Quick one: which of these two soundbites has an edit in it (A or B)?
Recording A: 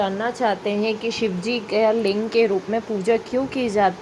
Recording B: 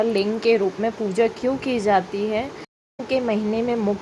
B